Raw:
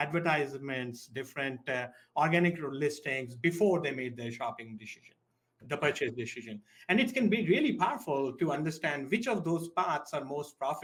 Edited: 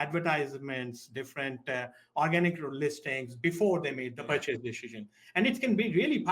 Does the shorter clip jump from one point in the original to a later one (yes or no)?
yes